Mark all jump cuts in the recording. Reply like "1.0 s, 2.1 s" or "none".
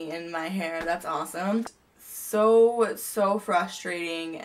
1.8 s